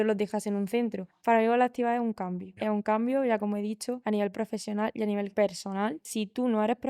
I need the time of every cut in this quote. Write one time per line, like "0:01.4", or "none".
0:01.1
0:02.5
0:04.0
0:05.3
0:06.1